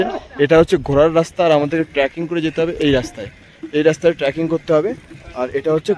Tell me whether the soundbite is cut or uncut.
uncut